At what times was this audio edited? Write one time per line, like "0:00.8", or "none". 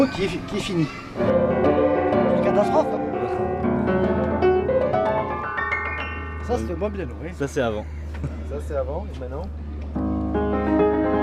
none